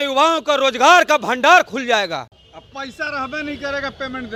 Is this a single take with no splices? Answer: yes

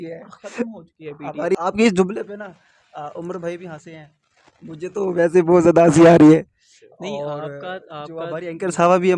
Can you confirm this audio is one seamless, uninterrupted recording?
no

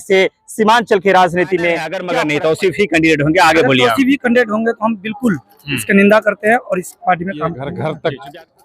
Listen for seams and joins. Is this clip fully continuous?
no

